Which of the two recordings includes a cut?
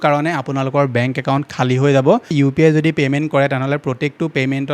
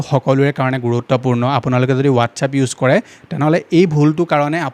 first; 1 cut; at 2.3 s

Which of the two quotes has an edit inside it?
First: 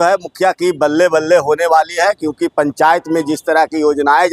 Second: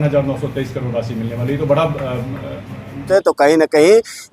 second; 1 cut; at 3.0 s

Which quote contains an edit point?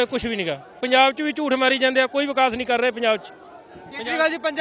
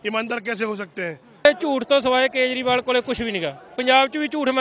second; 1 cut; at 1.4 s

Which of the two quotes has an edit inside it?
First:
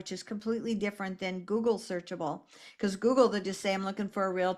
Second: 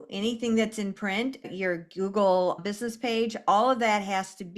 second; 2 cuts; at 1.5 s, 2.6 s

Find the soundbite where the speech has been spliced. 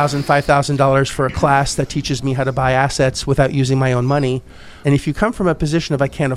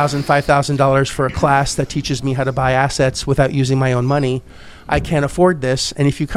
first; 1 cut; at 4.7 s

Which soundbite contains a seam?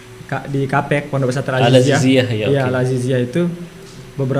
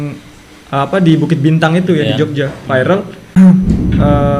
second; 1 cut; at 3.2 s

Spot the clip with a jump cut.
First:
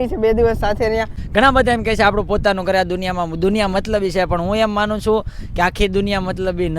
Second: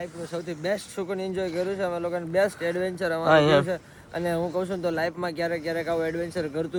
first; 1 cut; at 1.2 s

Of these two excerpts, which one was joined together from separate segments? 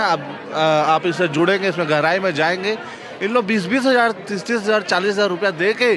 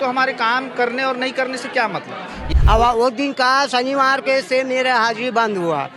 second; 1 cut; at 2.4 s

